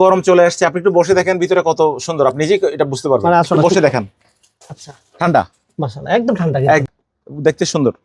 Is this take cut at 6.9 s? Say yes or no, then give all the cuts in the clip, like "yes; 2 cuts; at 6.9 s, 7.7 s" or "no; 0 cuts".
yes; 1 cut; at 6.9 s